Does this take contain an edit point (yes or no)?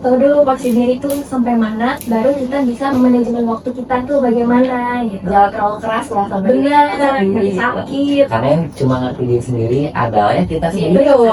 no